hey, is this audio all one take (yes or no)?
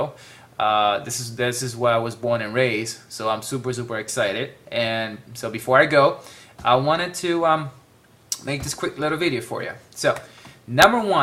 yes